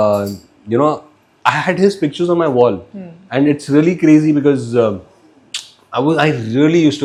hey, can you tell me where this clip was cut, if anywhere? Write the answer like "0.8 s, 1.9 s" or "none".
none

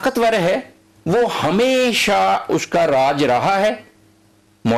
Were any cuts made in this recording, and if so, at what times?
none

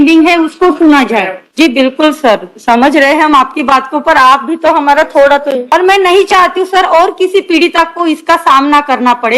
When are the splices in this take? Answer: 1.4 s, 5.6 s

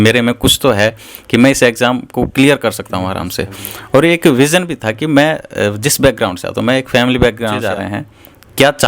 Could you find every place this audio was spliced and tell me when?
7.6 s

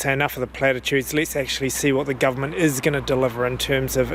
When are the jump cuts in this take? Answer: none

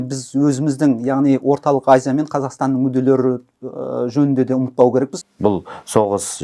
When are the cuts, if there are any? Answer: 5.2 s

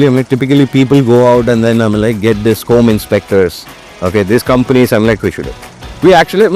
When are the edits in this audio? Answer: none

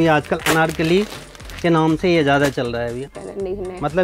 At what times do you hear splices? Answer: 3.1 s

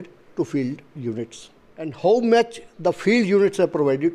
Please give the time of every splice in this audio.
1.9 s

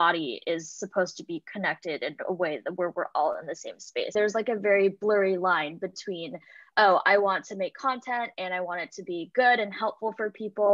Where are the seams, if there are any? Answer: 4.1 s

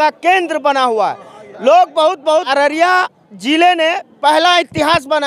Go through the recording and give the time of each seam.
2.5 s

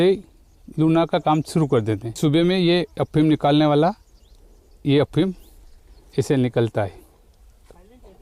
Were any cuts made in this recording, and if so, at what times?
2.1 s

